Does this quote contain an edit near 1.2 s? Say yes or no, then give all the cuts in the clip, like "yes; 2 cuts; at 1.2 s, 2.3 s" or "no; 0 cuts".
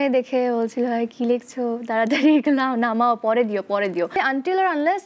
no; 1 cut; at 4.1 s